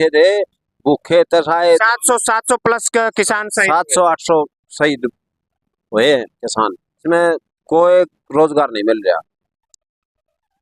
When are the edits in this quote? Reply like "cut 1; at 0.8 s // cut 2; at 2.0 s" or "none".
cut 1; at 7.0 s